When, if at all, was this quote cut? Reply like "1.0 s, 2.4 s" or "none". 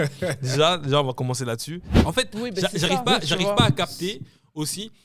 2.0 s